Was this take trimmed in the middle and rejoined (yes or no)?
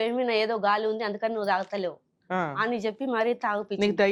no